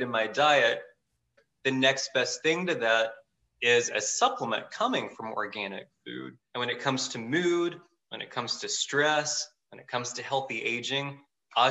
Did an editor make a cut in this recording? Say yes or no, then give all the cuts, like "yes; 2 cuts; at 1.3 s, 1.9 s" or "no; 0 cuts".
yes; 2 cuts; at 1.4 s, 6.3 s